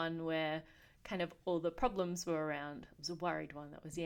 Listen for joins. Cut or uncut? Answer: uncut